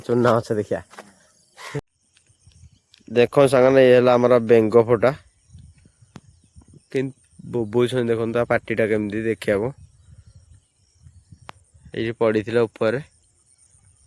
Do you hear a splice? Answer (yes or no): yes